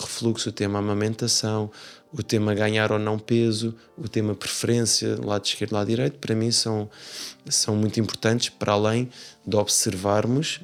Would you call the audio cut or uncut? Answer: uncut